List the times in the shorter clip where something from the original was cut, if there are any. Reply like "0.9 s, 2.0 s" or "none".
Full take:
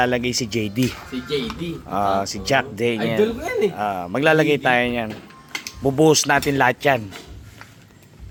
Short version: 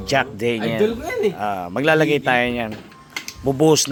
none